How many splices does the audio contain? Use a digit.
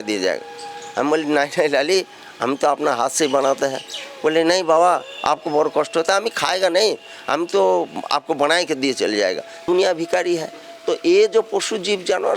1